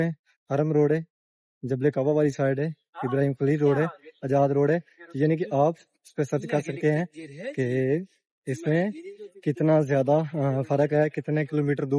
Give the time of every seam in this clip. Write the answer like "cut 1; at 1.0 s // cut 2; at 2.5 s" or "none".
none